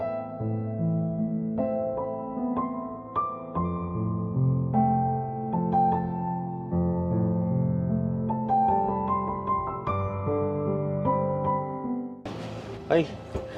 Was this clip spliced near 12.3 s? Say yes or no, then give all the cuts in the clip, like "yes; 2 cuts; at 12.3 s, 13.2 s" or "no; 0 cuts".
yes; 1 cut; at 12.3 s